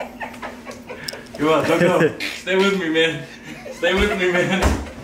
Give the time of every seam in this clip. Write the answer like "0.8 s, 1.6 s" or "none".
none

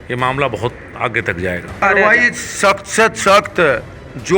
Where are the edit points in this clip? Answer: 1.8 s

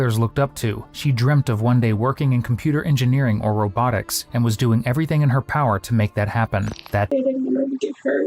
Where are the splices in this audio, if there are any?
7.1 s

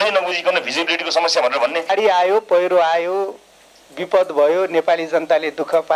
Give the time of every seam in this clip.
1.8 s

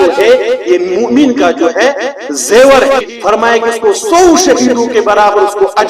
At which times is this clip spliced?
3.1 s

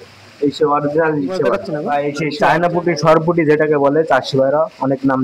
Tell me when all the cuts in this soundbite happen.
1.7 s

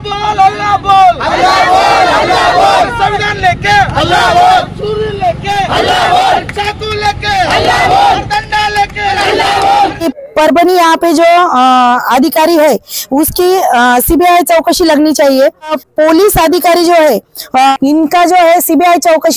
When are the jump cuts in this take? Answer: 10.1 s, 15.8 s, 17.7 s

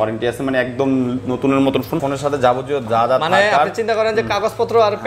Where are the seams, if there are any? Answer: 2.0 s

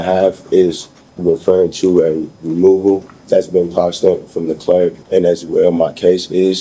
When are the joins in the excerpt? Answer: 3.1 s, 5.0 s

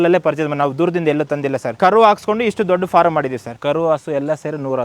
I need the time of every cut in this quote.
1.7 s, 3.5 s

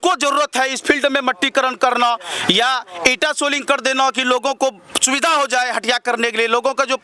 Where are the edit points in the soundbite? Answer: none

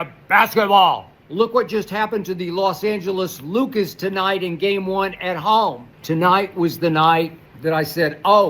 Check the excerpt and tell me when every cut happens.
1.2 s, 5.9 s, 7.4 s

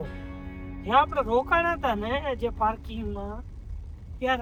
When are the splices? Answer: none

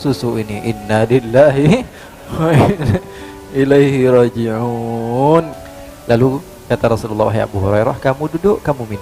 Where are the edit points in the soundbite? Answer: 5.5 s

